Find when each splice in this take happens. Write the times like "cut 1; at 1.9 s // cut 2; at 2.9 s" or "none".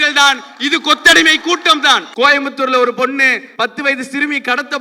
cut 1; at 2.1 s // cut 2; at 3.4 s